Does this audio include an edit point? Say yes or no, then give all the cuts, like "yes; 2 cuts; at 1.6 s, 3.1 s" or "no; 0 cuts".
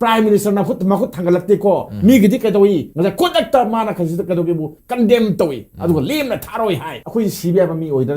yes; 1 cut; at 7.0 s